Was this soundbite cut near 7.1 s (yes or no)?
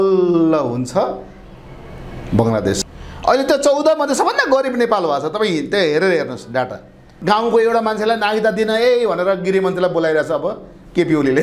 yes